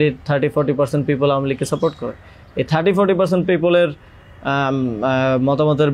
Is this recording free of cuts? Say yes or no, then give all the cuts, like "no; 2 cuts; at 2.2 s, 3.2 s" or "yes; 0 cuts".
yes; 0 cuts